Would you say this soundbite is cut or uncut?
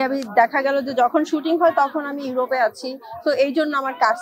uncut